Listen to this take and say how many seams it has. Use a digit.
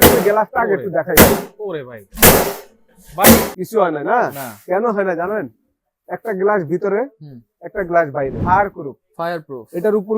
2